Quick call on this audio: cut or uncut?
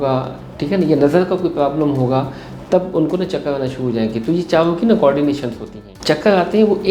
cut